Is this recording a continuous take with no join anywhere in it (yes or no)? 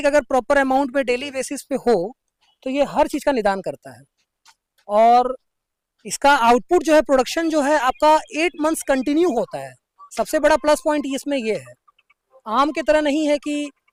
yes